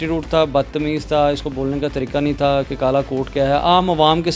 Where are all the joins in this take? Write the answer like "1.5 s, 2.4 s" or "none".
none